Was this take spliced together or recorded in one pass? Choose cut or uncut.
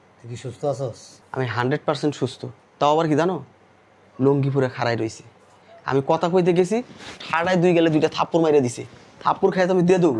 cut